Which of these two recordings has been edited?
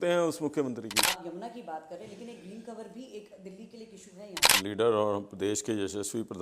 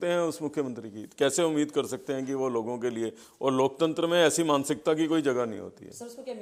first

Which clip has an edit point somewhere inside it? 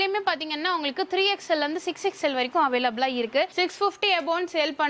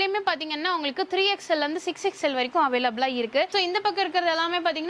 first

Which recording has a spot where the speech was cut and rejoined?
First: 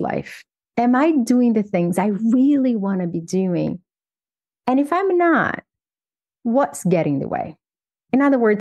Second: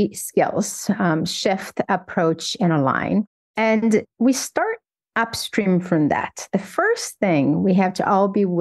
second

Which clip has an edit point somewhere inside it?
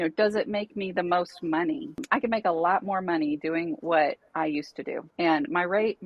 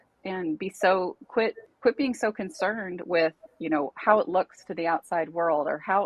first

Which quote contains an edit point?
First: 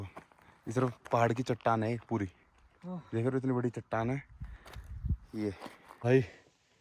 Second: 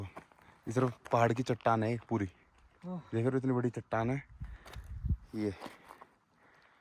first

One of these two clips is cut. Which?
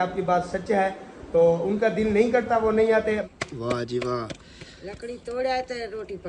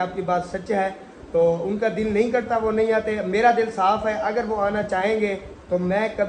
first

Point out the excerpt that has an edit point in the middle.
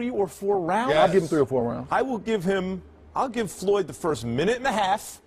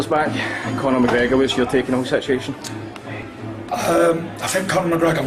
first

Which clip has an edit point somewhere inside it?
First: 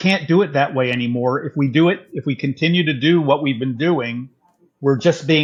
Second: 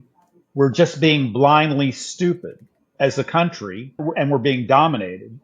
second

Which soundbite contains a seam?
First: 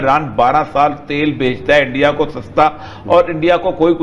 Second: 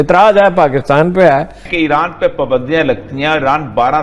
second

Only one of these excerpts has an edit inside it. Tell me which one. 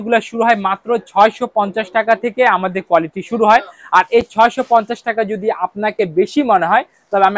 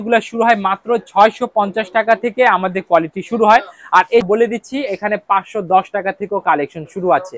second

